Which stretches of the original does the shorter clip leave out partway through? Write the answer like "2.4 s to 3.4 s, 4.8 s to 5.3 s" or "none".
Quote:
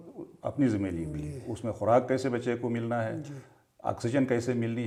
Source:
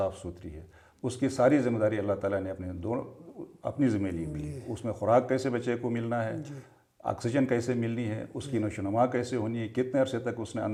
none